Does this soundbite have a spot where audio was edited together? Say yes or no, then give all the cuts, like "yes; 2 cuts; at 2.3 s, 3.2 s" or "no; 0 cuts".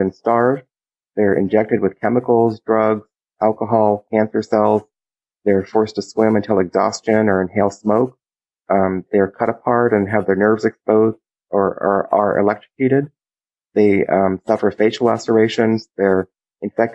no; 0 cuts